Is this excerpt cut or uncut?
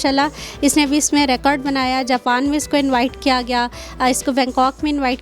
uncut